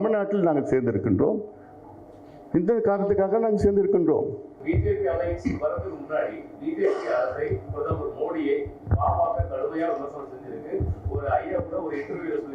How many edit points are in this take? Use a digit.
1